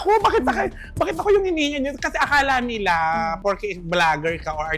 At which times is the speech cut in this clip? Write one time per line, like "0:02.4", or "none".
none